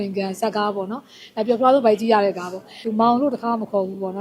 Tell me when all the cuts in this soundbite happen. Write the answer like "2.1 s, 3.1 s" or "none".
2.8 s